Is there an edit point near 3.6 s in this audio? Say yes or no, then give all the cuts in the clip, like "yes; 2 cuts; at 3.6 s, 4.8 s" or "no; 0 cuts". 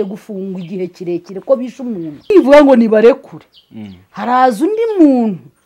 no; 1 cut; at 2.3 s